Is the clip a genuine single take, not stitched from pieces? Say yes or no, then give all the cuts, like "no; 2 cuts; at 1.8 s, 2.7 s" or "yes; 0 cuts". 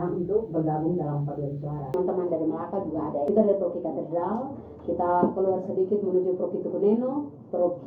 no; 2 cuts; at 1.9 s, 3.2 s